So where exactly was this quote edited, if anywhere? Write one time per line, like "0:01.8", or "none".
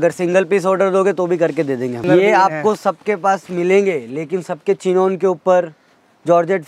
0:02.0